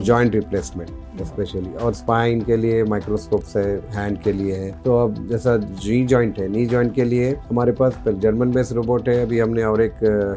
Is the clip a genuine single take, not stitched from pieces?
yes; 0 cuts

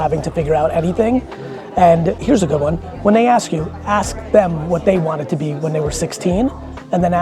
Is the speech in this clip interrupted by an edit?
yes; 1 cut; at 2.2 s

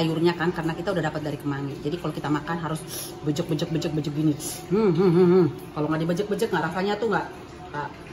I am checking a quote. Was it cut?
no; 0 cuts

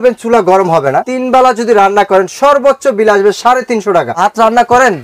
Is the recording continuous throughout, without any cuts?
no; 2 cuts; at 1.1 s, 4.1 s

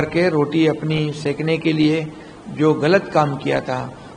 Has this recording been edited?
no; 0 cuts

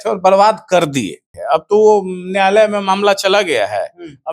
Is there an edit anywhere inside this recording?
yes; 1 cut; at 1.3 s

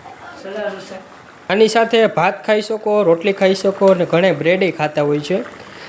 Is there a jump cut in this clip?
yes; 1 cut; at 1.5 s

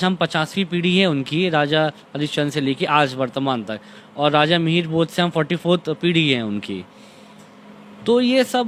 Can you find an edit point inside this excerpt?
no; 0 cuts

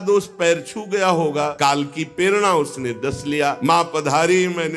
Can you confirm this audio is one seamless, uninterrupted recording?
no; 2 cuts; at 1.5 s, 3.6 s

